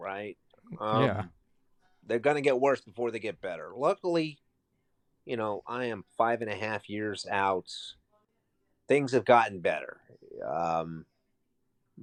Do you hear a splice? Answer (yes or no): no